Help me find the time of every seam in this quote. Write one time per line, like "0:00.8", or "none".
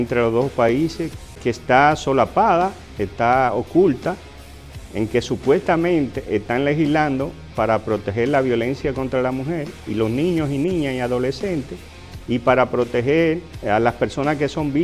0:01.4